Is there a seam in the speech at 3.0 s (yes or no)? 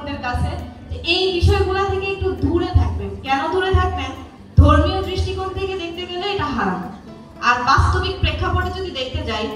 no